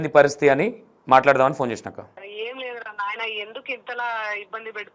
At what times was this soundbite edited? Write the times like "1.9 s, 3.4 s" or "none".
2.2 s